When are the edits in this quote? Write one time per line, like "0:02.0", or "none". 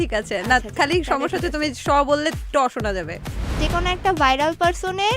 0:03.6